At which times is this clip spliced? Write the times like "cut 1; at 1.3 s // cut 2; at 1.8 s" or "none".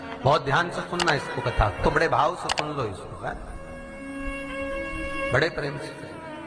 none